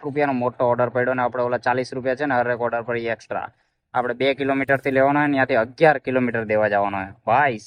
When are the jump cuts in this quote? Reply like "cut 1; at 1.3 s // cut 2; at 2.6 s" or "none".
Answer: none